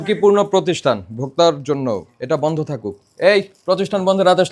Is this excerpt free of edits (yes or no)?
no